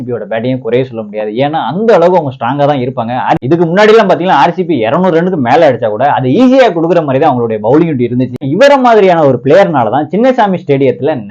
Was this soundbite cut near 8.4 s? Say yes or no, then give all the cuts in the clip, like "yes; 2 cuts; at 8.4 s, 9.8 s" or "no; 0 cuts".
yes; 2 cuts; at 3.4 s, 8.4 s